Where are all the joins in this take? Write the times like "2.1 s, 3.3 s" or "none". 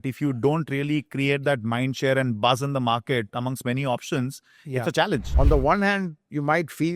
5.3 s